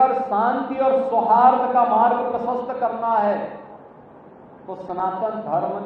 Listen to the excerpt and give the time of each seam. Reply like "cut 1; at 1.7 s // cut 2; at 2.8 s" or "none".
none